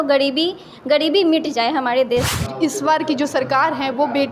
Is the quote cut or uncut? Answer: cut